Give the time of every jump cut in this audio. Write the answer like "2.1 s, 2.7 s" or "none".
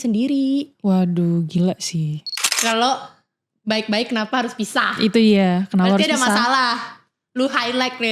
2.3 s